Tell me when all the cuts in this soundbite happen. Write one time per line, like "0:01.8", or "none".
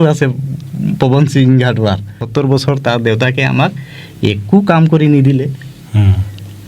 0:02.2